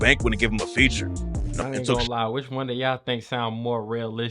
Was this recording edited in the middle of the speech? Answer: yes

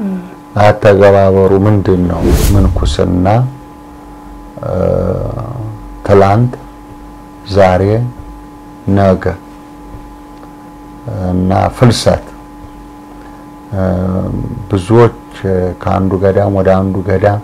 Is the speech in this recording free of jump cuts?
no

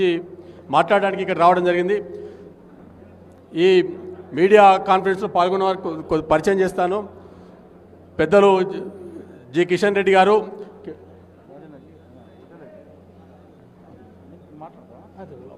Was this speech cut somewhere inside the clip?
no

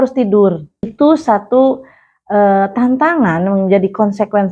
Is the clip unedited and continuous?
no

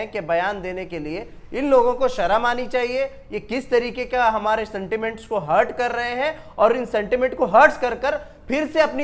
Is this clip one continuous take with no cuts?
yes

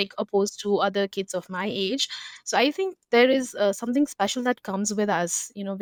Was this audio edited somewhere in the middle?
no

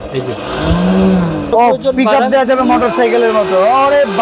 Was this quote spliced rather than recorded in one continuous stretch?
yes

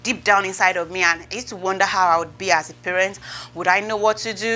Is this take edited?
no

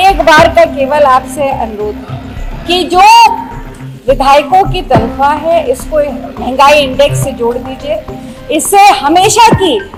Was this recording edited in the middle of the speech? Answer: no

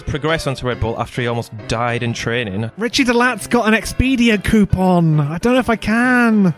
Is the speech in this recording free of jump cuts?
no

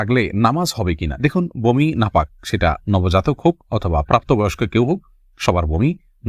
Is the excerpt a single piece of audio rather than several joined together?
yes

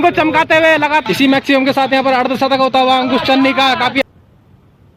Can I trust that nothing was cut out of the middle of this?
no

